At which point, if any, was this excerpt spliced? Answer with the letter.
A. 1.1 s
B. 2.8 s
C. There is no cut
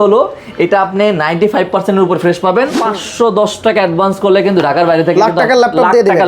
B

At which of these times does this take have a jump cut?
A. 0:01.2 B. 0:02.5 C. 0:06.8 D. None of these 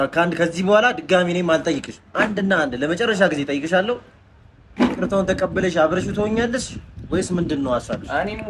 D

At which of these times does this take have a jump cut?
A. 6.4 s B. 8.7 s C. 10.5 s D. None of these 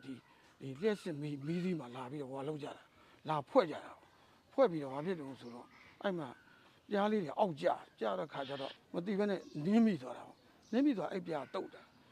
B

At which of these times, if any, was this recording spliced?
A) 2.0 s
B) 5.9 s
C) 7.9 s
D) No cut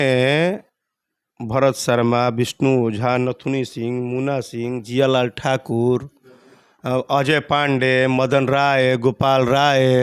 D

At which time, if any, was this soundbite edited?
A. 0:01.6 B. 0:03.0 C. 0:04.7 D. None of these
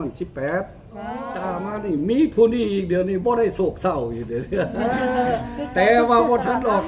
A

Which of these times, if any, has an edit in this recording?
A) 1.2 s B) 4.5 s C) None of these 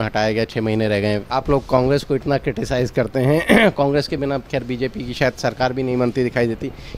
A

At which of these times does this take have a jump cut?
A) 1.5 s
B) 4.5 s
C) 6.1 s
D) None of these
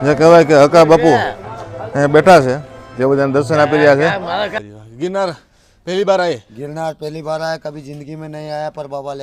B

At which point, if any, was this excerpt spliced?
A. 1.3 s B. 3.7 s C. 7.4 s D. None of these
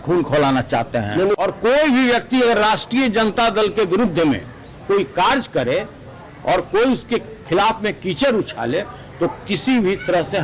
A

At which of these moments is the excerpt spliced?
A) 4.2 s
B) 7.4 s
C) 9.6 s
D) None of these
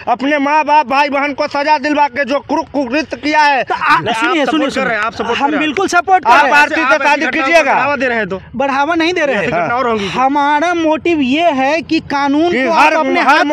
D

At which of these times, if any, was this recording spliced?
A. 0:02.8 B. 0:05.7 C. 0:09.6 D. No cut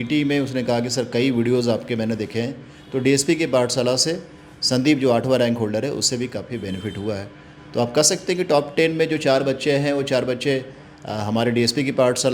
D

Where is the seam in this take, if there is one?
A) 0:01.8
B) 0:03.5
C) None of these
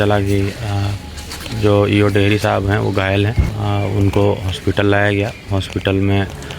B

